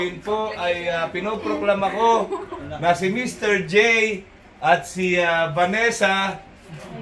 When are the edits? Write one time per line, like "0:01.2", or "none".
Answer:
none